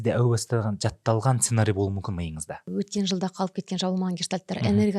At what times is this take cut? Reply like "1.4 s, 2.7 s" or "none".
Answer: 2.7 s

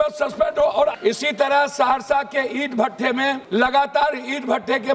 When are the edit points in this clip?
0.9 s, 3.4 s

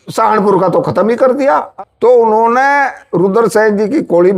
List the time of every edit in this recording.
1.7 s

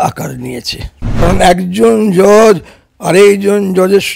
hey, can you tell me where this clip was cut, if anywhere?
1.2 s

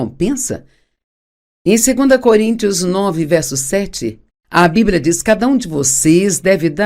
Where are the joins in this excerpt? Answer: 1.7 s

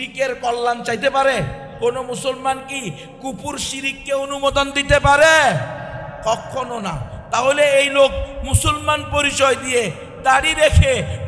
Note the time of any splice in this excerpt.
1.6 s

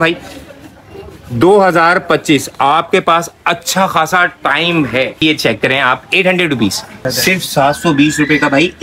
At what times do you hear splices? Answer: 5.2 s, 7.1 s

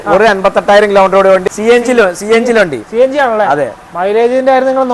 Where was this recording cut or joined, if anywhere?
1.4 s

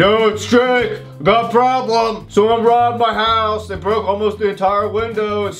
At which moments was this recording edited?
none

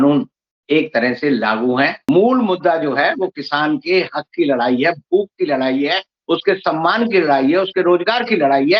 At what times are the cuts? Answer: 2.0 s

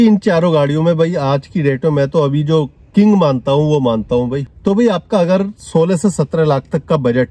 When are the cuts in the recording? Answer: 4.4 s

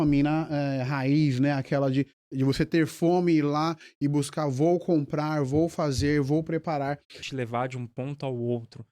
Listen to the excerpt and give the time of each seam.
7.2 s

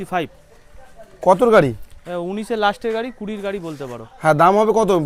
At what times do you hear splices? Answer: none

